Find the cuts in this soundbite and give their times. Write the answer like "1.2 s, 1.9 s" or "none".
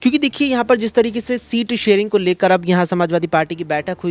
none